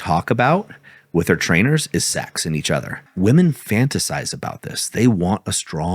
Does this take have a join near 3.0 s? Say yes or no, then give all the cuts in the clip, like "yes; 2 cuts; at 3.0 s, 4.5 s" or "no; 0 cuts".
yes; 1 cut; at 3.0 s